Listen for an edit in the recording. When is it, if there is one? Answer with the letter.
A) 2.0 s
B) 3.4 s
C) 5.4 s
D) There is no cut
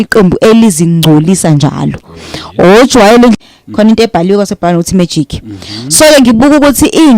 B